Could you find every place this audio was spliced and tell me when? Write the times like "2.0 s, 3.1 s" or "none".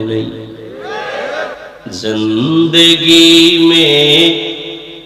1.7 s